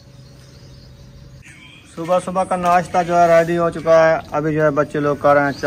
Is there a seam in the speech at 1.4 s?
yes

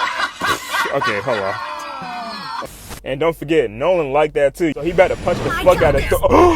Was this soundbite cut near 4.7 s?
yes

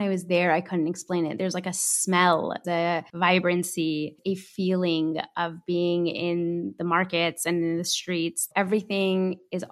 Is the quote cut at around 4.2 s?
yes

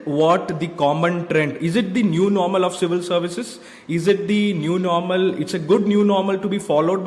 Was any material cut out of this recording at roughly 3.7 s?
no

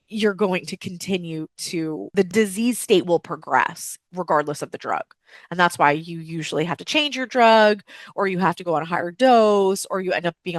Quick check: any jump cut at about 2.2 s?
yes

